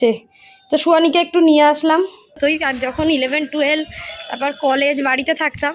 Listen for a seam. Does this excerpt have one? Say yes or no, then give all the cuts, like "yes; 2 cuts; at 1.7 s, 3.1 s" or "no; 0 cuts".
yes; 1 cut; at 2.4 s